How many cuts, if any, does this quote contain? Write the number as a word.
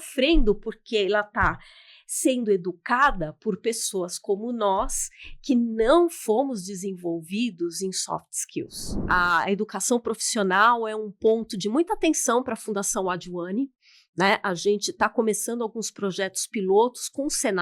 one